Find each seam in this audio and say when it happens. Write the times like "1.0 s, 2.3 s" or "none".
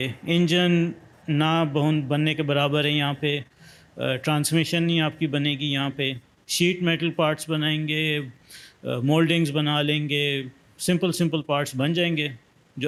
none